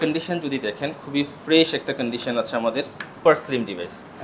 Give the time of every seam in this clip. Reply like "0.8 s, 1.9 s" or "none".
3.2 s